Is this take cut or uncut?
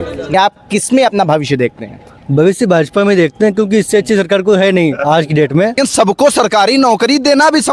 cut